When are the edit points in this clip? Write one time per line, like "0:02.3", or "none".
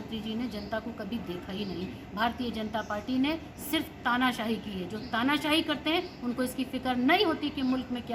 none

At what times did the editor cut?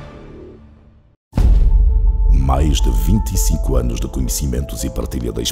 0:01.3

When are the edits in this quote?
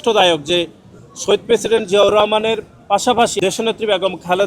0:03.3

